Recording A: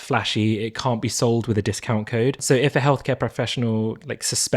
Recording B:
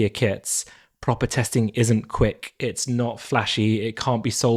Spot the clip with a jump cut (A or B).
A